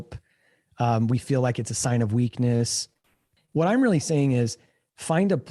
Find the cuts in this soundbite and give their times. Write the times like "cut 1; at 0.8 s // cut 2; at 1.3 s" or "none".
cut 1; at 3.3 s

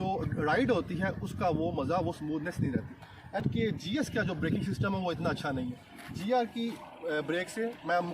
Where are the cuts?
cut 1; at 3.4 s

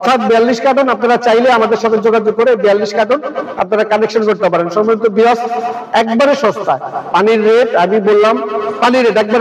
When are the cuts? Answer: none

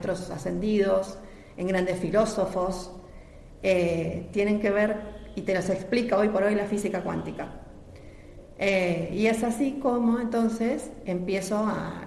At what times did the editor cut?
none

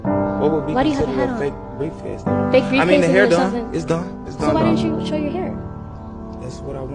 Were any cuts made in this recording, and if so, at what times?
cut 1; at 2.6 s

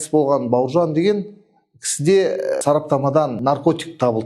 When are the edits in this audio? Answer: cut 1; at 2.6 s // cut 2; at 3.4 s

